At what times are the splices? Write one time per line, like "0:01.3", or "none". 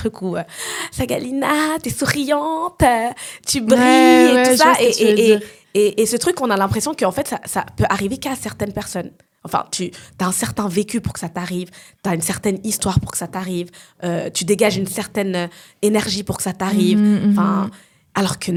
none

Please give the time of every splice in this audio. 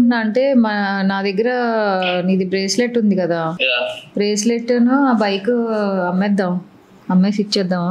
0:03.6

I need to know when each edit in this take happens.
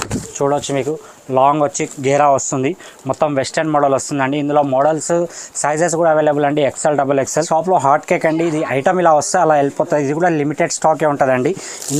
0:07.3

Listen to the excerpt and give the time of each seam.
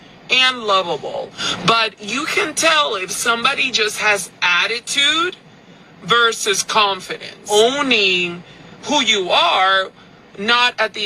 0:01.4
0:07.5

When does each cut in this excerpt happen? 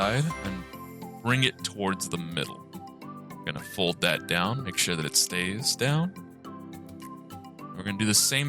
0:06.1
0:07.7

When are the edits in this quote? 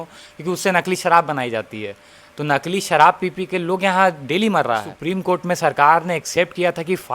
0:04.9

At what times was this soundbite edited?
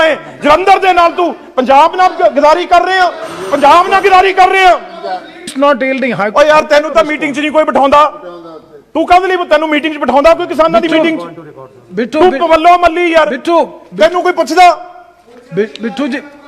0:05.5

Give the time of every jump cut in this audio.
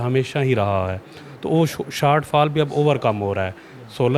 none

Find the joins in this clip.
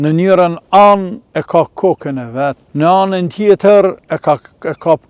0:01.2
0:02.6
0:04.1

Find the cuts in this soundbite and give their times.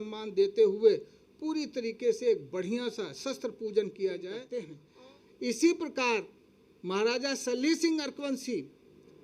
0:04.8

